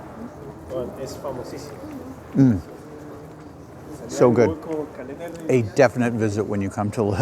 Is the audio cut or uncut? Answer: uncut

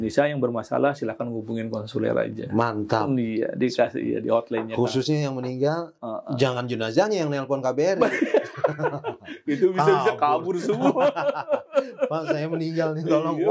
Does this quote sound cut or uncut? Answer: uncut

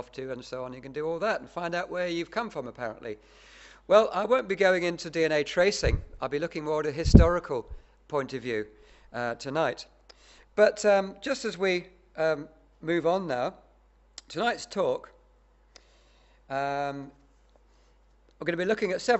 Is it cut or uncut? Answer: uncut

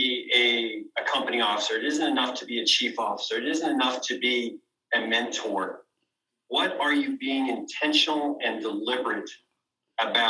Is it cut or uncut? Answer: uncut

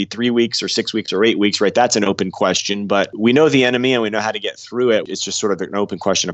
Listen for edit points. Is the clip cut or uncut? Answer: cut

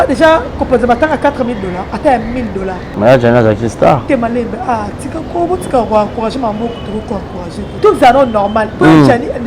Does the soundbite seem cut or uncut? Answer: cut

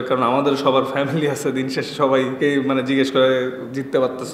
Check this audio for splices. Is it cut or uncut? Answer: cut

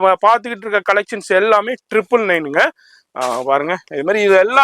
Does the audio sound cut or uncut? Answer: uncut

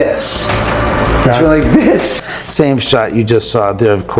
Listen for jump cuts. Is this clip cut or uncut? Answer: cut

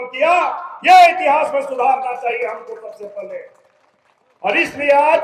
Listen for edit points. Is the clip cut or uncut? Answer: uncut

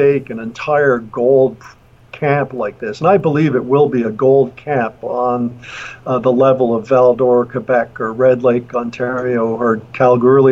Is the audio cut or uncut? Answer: uncut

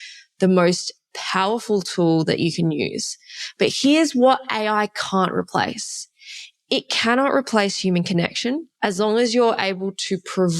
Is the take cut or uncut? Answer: cut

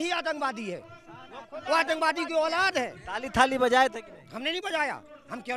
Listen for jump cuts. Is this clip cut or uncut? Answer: uncut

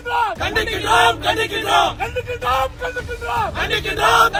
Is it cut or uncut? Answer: uncut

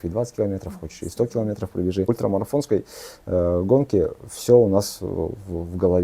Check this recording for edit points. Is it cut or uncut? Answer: cut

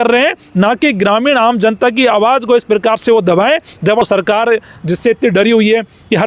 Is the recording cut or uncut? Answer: cut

